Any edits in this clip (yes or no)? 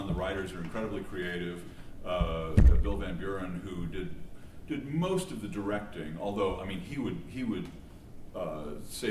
no